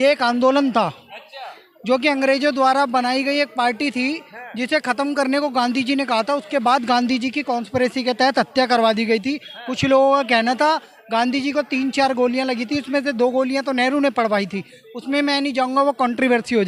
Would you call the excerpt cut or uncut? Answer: uncut